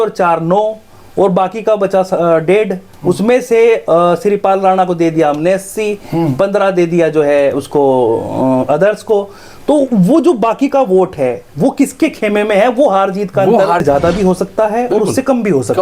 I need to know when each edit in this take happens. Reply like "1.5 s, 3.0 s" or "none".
13.8 s